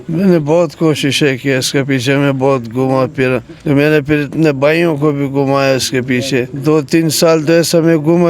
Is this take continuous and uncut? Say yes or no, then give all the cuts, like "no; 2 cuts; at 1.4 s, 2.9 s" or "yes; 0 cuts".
no; 2 cuts; at 3.5 s, 6.5 s